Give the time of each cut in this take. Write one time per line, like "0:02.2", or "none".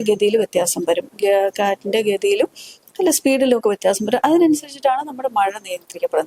none